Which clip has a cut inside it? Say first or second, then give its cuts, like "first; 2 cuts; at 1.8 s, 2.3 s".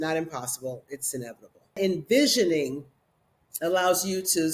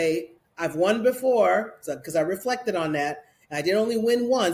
first; 1 cut; at 1.8 s